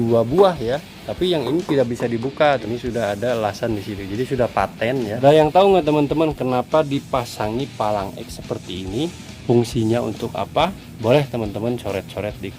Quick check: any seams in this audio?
yes; 4 cuts; at 1.0 s, 2.6 s, 5.2 s, 10.5 s

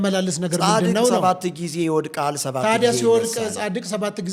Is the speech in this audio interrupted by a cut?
no; 0 cuts

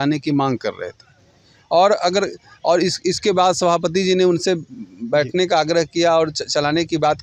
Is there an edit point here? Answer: no; 0 cuts

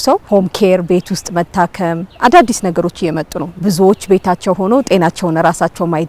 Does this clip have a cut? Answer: no; 0 cuts

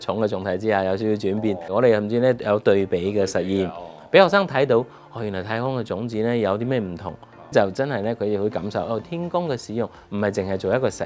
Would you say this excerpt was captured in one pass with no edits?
no; 2 cuts; at 1.7 s, 7.5 s

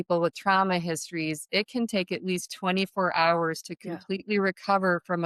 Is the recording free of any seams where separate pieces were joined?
yes; 0 cuts

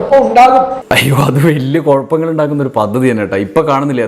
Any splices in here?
no; 0 cuts

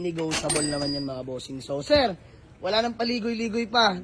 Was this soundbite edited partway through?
no; 0 cuts

